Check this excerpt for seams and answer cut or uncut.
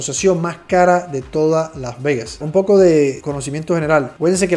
uncut